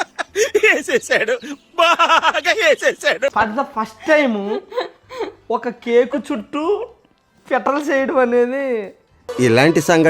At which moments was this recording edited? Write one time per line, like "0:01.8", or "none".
0:03.3